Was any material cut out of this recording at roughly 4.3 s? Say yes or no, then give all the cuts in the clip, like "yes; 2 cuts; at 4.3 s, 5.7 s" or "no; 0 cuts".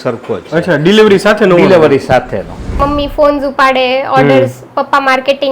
no; 1 cut; at 2.8 s